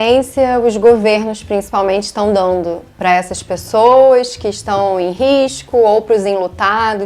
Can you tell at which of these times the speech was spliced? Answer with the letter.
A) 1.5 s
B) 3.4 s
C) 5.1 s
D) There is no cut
D